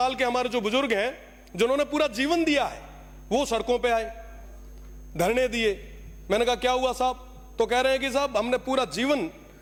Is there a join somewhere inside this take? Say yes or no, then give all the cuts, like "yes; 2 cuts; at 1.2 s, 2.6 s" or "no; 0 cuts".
no; 0 cuts